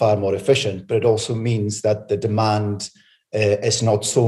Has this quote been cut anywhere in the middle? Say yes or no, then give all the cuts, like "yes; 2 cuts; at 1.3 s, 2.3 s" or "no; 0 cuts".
no; 0 cuts